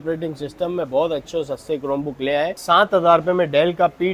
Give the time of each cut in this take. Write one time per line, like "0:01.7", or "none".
0:02.6